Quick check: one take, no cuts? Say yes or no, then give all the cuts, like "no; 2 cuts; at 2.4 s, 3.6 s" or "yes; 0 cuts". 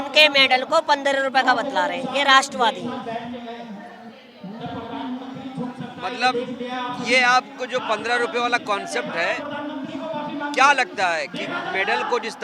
yes; 0 cuts